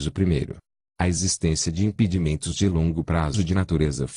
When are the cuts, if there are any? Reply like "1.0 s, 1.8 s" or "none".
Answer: 1.0 s